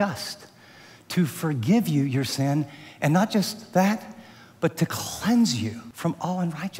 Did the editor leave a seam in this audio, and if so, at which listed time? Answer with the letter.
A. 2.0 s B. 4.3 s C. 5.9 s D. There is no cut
C